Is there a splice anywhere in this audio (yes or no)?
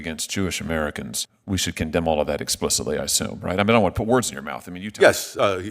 yes